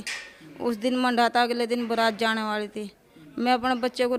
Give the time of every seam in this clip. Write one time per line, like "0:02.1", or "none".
none